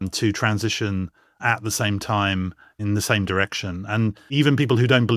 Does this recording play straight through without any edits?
no; 2 cuts; at 2.8 s, 4.3 s

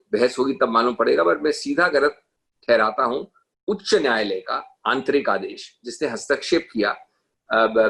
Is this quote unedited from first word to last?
yes; 0 cuts

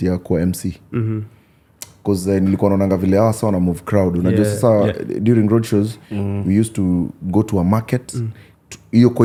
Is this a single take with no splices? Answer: yes; 0 cuts

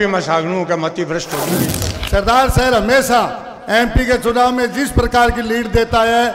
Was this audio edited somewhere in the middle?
yes; 1 cut; at 1.8 s

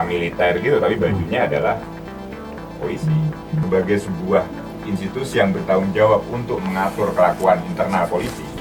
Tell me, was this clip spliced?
yes; 1 cut; at 3.6 s

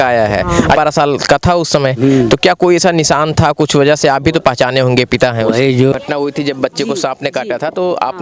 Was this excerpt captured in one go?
no; 2 cuts; at 0.8 s, 5.9 s

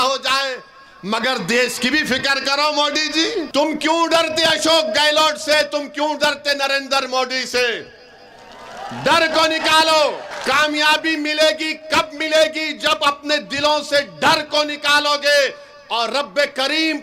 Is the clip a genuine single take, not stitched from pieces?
no; 2 cuts; at 3.5 s, 10.3 s

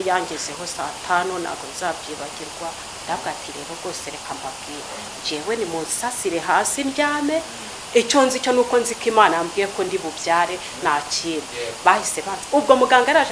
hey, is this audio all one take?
no; 1 cut; at 2.9 s

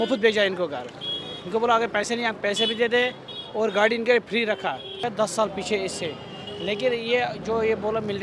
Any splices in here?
yes; 1 cut; at 5.0 s

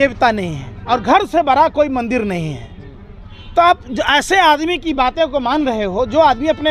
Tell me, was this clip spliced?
no; 0 cuts

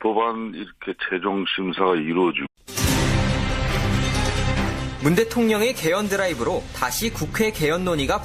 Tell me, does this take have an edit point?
no; 0 cuts

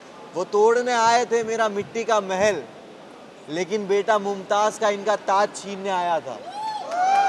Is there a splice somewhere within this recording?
no; 0 cuts

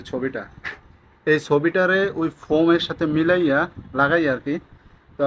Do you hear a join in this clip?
no; 0 cuts

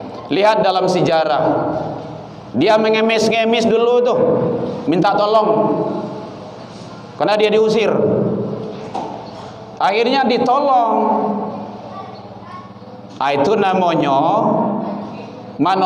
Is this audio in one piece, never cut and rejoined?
yes; 0 cuts

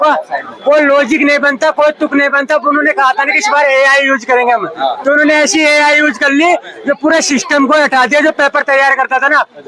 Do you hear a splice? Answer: no; 0 cuts

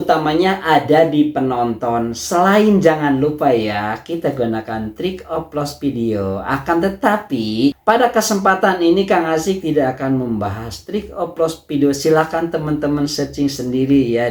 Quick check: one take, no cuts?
yes; 0 cuts

